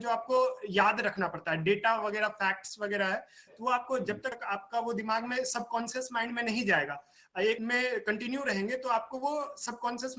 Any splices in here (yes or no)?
yes